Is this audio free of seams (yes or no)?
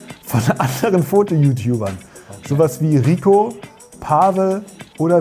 yes